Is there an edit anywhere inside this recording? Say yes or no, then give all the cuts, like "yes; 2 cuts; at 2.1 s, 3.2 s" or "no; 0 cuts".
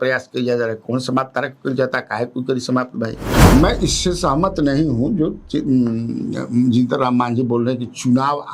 yes; 1 cut; at 3.4 s